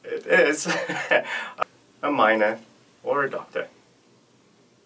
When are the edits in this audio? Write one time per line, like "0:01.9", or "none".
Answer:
0:01.5